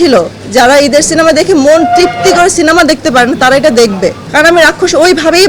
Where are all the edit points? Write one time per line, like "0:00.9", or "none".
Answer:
0:04.2